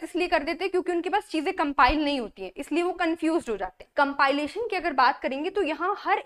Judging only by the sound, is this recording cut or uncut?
cut